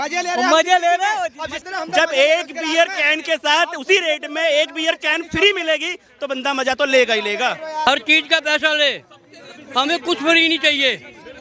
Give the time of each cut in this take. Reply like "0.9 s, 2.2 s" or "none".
1.5 s, 7.9 s